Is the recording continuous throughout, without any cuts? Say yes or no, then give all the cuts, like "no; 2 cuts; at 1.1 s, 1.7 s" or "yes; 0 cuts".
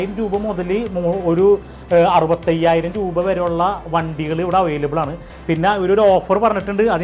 yes; 0 cuts